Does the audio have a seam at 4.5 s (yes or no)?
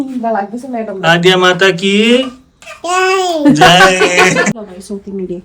yes